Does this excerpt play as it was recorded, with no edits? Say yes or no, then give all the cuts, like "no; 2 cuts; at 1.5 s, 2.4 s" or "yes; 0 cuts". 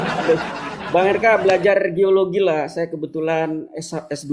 yes; 0 cuts